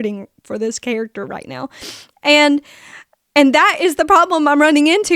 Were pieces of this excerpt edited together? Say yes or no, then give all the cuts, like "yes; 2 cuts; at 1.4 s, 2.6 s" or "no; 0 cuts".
no; 0 cuts